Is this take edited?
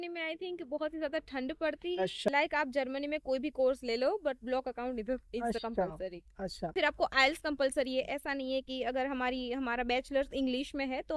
yes; 2 cuts; at 2.3 s, 6.7 s

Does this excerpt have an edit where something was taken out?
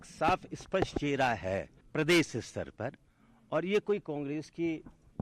yes; 1 cut; at 1.8 s

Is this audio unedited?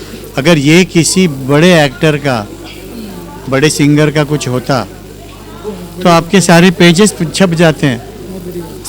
yes; 0 cuts

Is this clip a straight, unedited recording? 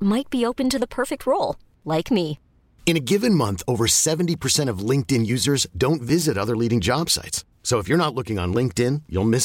yes; 0 cuts

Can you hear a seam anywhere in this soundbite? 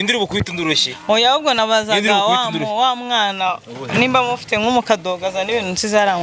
no; 0 cuts

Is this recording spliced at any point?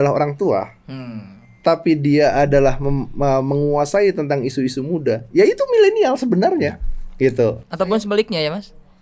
no; 0 cuts

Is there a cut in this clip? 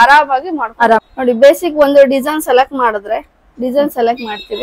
yes; 1 cut; at 1.1 s

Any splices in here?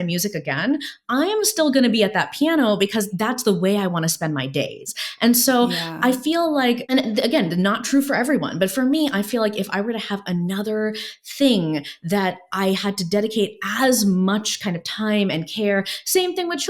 yes; 2 cuts; at 3.1 s, 6.8 s

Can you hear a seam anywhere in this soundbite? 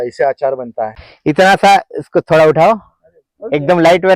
yes; 1 cut; at 1.0 s

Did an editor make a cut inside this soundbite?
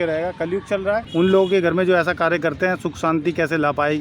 yes; 1 cut; at 1.1 s

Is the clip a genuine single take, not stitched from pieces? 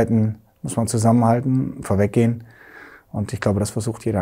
yes; 0 cuts

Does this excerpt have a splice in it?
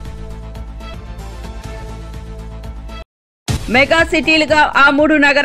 yes; 2 cuts; at 0.9 s, 3.0 s

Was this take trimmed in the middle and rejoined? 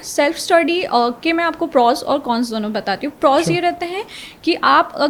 no; 0 cuts

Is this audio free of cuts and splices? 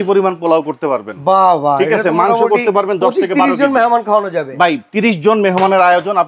yes; 0 cuts

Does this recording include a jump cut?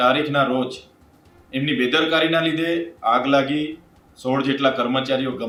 no; 0 cuts

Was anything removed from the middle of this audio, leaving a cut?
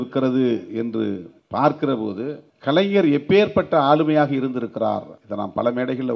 yes; 3 cuts; at 1.3 s, 2.5 s, 5.2 s

